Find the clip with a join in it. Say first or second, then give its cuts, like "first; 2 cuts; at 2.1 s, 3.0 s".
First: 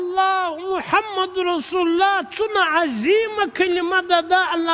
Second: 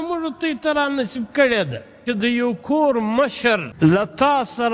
second; 2 cuts; at 2.0 s, 3.7 s